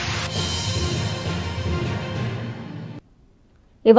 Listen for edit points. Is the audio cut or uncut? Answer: uncut